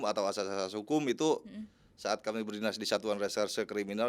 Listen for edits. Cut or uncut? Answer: uncut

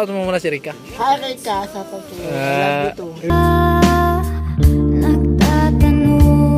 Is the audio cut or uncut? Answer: cut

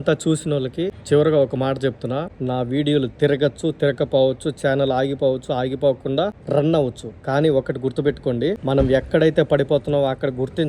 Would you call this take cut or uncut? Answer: cut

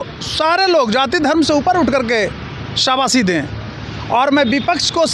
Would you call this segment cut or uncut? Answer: uncut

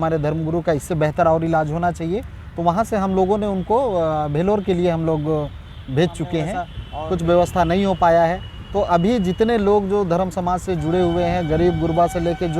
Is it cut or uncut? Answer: cut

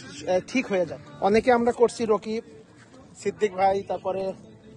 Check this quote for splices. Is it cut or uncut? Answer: cut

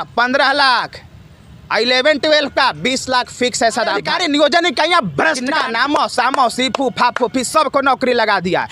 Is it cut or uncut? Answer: cut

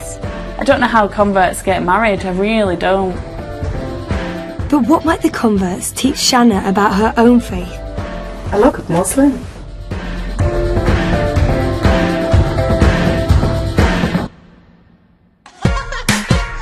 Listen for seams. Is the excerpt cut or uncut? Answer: cut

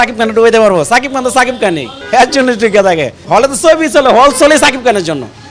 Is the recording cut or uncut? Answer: cut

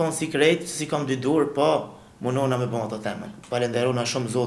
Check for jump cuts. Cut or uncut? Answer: cut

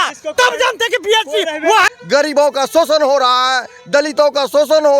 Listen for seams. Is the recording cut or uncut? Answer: cut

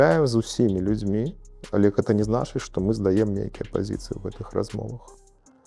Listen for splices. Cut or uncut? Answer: uncut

